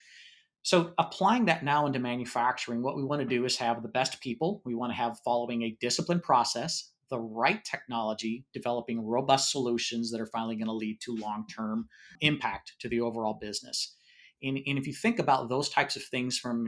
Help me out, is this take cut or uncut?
cut